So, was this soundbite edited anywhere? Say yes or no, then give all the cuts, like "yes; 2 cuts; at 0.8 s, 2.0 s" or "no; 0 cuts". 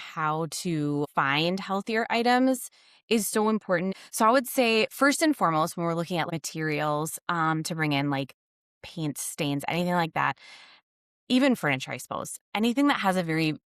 yes; 3 cuts; at 1.0 s, 3.9 s, 6.3 s